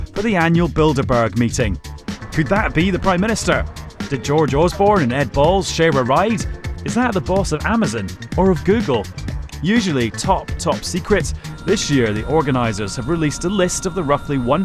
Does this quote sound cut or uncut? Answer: uncut